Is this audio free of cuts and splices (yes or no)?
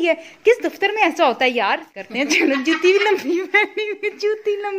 no